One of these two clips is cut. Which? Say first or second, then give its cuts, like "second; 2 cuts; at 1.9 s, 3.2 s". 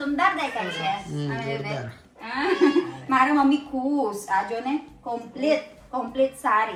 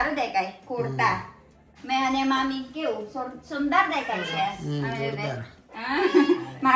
second; 1 cut; at 1.6 s